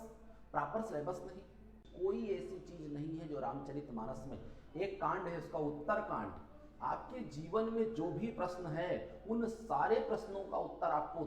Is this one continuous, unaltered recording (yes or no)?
no